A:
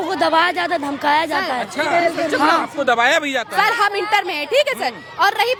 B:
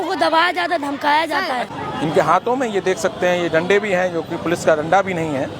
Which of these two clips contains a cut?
B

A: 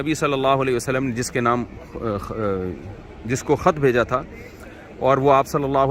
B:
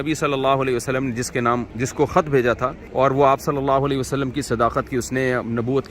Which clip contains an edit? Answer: B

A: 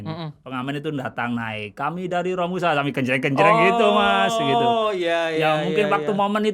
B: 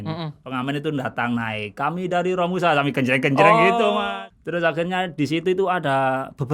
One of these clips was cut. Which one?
B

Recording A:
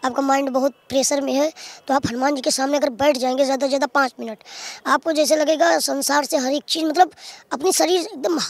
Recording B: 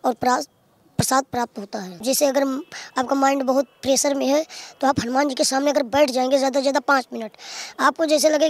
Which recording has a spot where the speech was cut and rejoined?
B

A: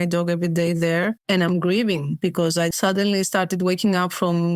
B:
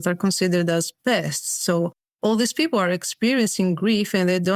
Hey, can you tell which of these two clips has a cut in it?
A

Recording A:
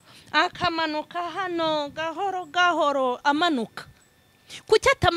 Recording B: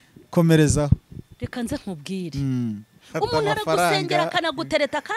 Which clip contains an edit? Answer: B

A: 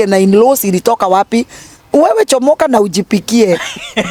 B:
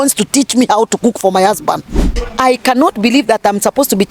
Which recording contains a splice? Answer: B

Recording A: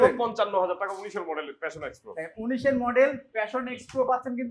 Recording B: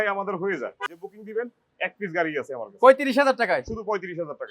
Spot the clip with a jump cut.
B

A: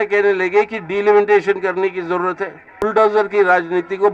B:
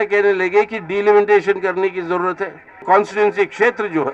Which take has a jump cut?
A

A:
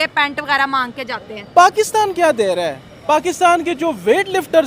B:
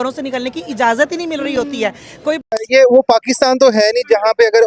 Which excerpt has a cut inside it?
B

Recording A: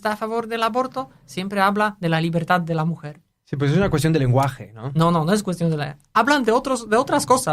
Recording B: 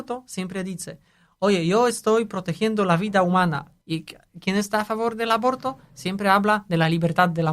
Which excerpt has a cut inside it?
B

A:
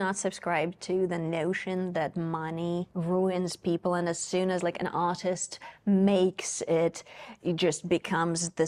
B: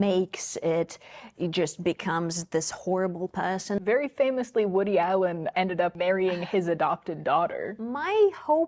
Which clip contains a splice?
B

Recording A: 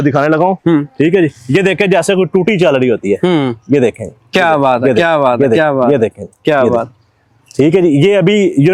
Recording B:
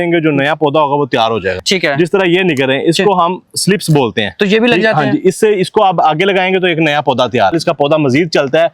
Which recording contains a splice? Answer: B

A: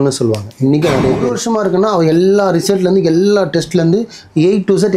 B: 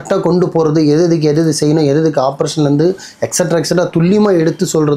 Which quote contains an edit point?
A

